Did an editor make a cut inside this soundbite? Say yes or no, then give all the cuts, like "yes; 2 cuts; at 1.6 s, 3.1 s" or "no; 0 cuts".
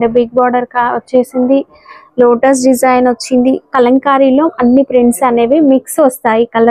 no; 0 cuts